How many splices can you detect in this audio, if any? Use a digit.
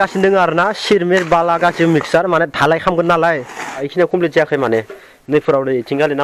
1